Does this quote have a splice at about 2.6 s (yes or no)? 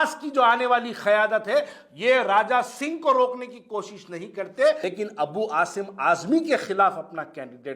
no